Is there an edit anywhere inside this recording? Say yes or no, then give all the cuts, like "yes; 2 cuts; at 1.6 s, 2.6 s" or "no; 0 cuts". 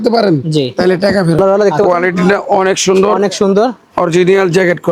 yes; 1 cut; at 1.4 s